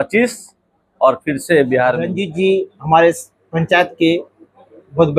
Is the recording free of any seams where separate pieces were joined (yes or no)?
no